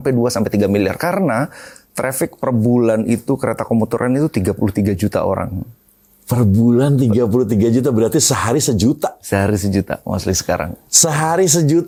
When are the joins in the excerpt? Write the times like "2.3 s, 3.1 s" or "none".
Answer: none